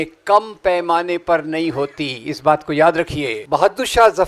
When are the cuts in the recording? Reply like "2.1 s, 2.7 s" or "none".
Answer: 3.4 s